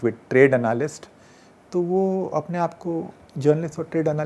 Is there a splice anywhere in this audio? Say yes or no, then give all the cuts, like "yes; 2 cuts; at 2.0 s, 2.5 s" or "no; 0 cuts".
no; 0 cuts